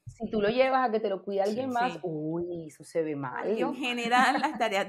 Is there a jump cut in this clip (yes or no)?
yes